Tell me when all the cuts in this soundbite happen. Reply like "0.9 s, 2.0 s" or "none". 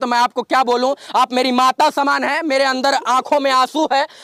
none